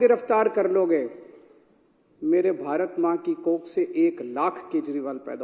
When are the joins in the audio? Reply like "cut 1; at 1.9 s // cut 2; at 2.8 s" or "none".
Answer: none